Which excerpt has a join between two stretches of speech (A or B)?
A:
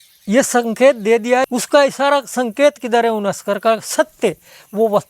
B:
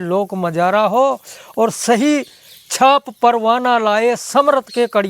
A